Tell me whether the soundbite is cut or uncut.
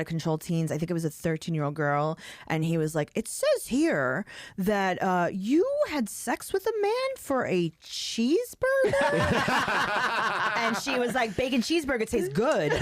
uncut